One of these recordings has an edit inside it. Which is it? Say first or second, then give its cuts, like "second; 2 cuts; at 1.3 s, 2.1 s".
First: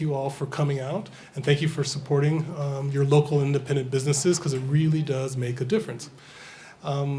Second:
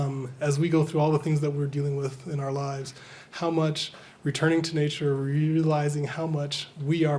second; 1 cut; at 1.1 s